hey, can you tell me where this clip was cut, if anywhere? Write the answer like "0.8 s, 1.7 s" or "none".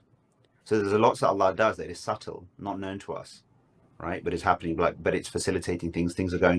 4.9 s